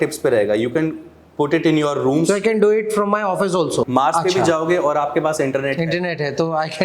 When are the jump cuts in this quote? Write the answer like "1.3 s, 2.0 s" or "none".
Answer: 3.9 s